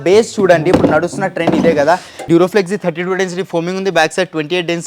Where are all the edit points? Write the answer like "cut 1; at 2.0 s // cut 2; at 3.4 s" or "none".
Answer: cut 1; at 2.1 s